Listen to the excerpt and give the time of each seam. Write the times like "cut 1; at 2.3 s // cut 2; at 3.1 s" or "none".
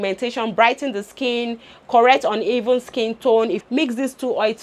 cut 1; at 3.6 s